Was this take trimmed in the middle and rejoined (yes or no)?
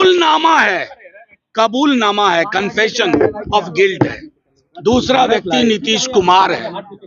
no